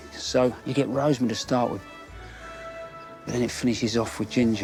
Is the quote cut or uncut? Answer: uncut